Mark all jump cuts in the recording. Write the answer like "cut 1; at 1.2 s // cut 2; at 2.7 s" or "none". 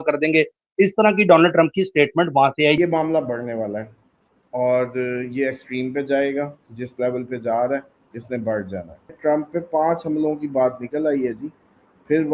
cut 1; at 2.8 s // cut 2; at 9.1 s